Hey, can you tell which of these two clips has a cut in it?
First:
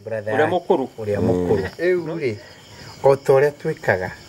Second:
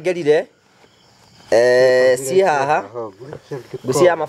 first; 1 cut; at 1.7 s

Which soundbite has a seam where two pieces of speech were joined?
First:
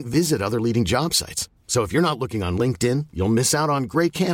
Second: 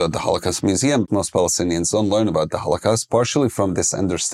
second; 1 cut; at 1.1 s

